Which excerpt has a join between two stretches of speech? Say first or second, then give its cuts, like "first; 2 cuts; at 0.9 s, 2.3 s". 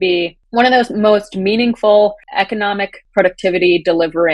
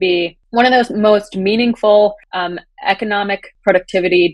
first; 1 cut; at 2.2 s